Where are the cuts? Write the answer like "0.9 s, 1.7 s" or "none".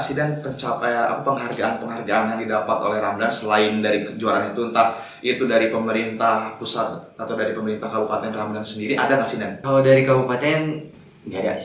9.5 s